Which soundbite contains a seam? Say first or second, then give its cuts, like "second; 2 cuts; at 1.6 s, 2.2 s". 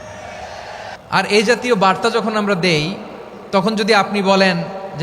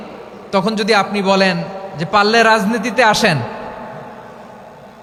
first; 1 cut; at 0.9 s